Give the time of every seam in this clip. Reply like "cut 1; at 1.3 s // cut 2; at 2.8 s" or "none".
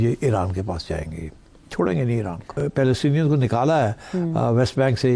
cut 1; at 2.5 s